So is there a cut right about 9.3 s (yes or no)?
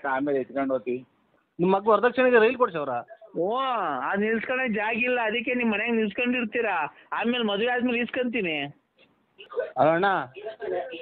yes